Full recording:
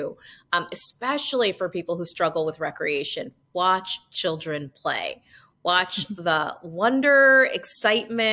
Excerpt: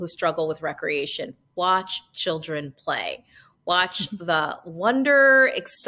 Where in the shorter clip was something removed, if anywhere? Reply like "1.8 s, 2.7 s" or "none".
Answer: none

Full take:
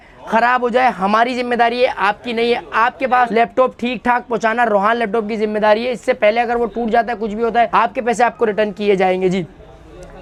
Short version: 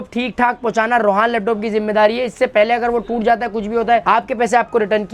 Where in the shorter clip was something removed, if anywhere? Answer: none

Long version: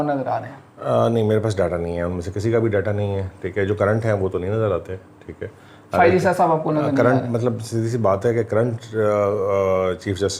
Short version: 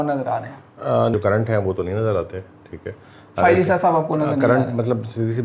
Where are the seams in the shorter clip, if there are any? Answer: 1.1 s

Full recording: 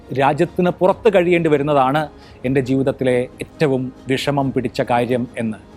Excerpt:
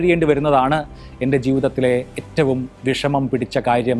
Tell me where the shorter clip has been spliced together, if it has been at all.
none

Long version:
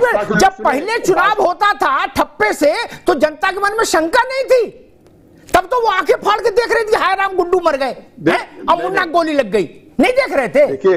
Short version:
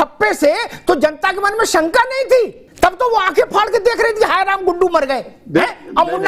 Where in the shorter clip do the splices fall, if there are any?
2.6 s

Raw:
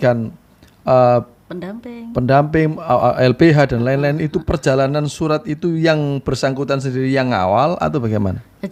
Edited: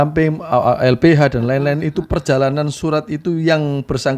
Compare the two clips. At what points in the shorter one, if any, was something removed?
none

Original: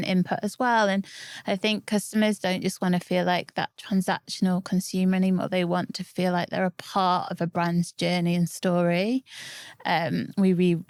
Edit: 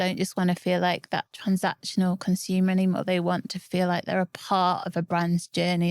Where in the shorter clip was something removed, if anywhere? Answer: none

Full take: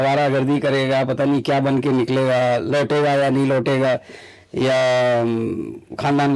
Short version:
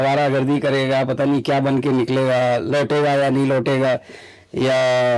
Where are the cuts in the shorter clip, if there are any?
none

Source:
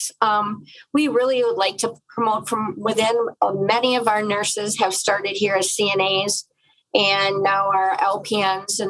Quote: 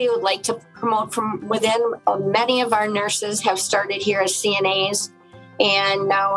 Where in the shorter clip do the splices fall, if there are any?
none

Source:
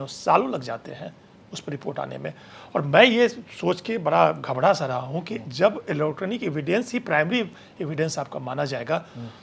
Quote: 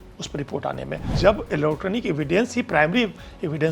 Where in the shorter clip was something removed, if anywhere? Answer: 1.0 s

